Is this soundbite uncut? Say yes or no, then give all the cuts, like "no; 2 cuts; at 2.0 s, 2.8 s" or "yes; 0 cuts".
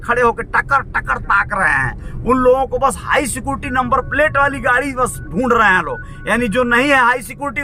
yes; 0 cuts